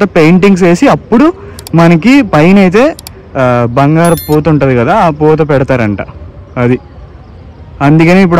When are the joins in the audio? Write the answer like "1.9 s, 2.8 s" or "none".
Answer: none